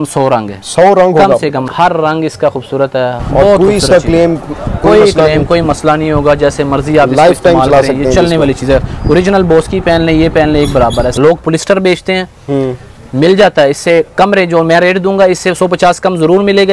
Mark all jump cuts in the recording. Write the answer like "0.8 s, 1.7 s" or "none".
1.6 s, 3.2 s, 11.2 s